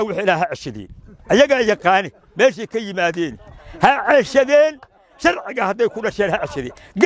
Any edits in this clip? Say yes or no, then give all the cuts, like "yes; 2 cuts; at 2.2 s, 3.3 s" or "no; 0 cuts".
no; 0 cuts